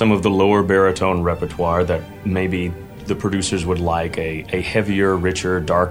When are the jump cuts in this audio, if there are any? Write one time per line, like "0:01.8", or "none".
0:02.1
0:03.0